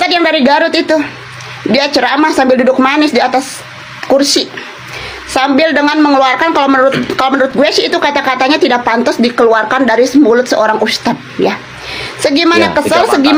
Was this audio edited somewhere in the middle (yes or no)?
no